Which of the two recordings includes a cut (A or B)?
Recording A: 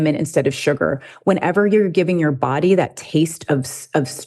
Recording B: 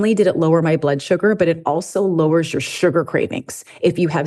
A